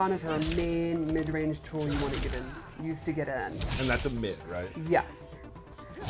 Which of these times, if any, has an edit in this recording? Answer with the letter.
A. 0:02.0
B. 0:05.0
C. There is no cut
C